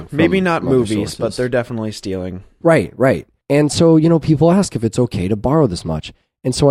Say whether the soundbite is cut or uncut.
cut